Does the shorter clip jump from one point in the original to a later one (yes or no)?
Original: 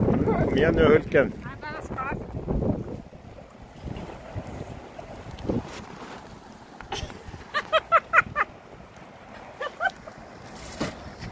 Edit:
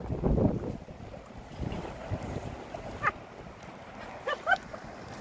yes